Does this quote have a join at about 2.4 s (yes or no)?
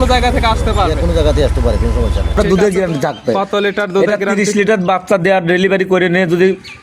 yes